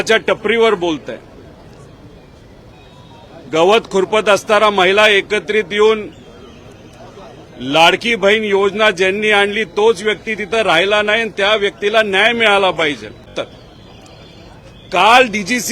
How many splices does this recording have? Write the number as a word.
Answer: one